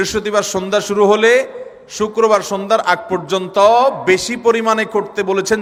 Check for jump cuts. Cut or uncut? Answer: uncut